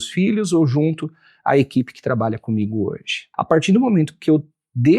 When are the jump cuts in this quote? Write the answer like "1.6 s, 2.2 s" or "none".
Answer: 3.2 s